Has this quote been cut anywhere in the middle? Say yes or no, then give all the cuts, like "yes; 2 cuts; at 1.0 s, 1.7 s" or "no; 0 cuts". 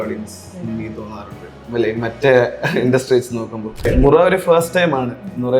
yes; 1 cut; at 3.9 s